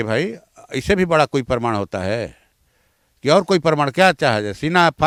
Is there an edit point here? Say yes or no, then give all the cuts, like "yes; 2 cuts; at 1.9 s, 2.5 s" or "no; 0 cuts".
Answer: no; 0 cuts